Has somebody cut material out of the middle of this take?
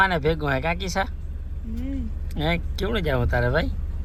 no; 0 cuts

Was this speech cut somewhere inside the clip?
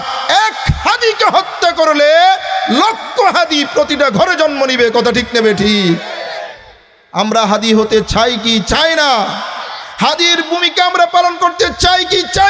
no; 0 cuts

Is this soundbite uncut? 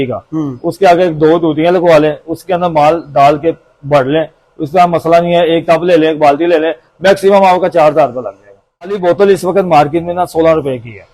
no; 1 cut; at 9.0 s

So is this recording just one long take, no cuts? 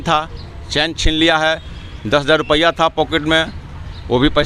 yes; 0 cuts

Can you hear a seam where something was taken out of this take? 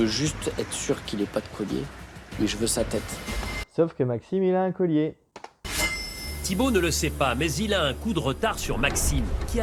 no; 0 cuts

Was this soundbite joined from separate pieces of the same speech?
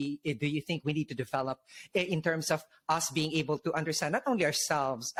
no; 0 cuts

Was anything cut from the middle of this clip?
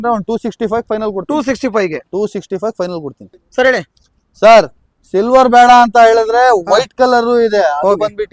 no; 0 cuts

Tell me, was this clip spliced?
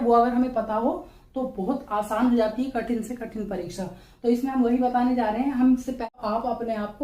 yes; 1 cut; at 6.1 s

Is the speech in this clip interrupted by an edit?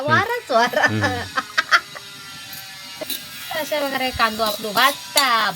yes; 1 cut; at 3.0 s

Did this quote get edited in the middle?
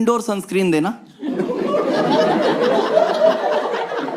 no; 0 cuts

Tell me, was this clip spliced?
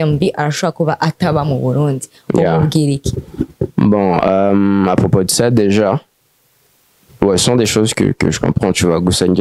no; 0 cuts

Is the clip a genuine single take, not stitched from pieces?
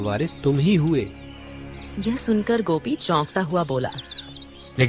yes; 0 cuts

